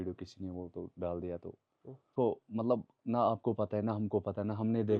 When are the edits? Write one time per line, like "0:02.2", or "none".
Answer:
0:02.1